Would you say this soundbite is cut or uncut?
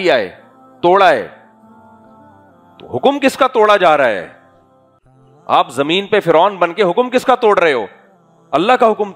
uncut